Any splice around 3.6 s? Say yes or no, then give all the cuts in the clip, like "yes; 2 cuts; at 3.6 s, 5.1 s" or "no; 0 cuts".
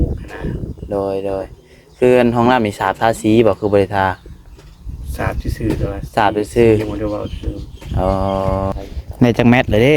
no; 1 cut; at 8.7 s